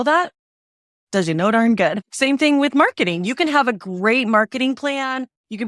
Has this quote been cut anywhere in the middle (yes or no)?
yes